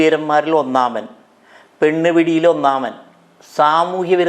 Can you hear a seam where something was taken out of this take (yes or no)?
no